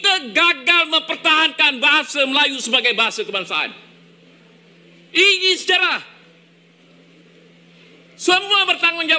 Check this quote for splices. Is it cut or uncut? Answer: cut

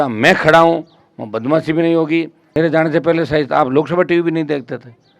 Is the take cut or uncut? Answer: cut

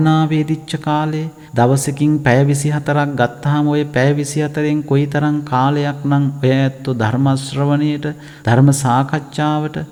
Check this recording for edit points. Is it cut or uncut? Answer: uncut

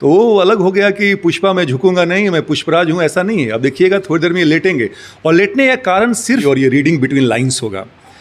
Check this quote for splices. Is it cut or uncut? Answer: cut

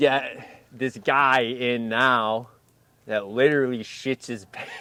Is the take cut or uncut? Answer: uncut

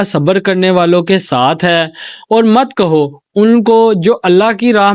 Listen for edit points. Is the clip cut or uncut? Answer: uncut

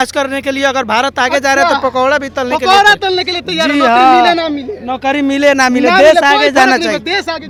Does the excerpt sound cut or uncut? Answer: uncut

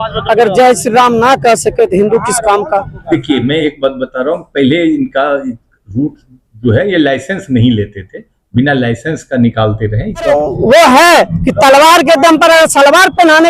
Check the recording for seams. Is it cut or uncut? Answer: cut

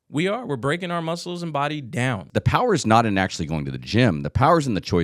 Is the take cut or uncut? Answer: cut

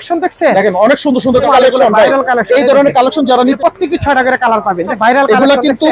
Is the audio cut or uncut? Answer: cut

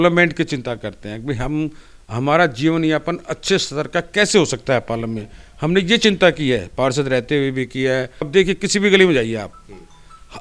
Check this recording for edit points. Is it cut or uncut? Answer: cut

